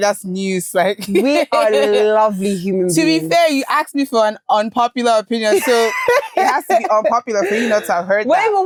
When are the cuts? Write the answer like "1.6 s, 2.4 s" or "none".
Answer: none

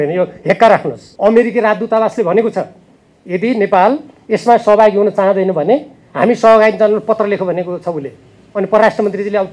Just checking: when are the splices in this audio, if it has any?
1.0 s

